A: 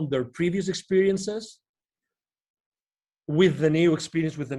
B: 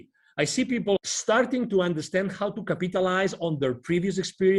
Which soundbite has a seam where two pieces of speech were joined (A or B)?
B